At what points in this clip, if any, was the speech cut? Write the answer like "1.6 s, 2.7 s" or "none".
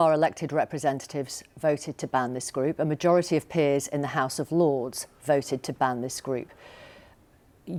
none